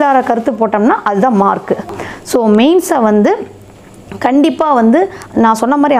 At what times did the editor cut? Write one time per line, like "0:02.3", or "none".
0:02.0